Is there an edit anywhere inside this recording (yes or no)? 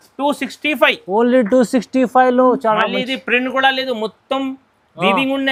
no